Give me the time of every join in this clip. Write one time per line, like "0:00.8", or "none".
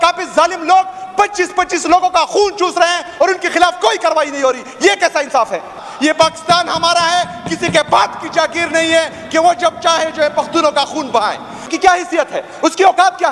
0:05.9
0:11.7